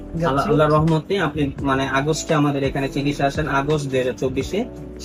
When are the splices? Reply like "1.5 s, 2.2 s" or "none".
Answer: none